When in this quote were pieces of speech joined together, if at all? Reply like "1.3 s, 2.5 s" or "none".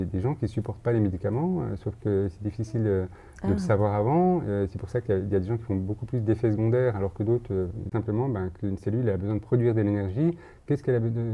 7.9 s